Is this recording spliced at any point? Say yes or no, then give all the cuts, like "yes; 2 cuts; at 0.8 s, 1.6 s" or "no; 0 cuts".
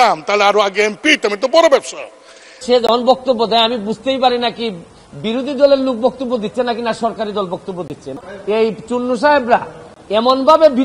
yes; 2 cuts; at 2.6 s, 8.1 s